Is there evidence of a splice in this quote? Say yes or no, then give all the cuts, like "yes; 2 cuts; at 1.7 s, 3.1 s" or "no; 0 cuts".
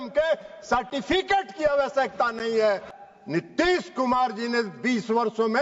yes; 1 cut; at 2.9 s